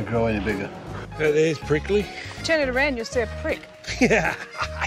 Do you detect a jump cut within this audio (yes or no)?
yes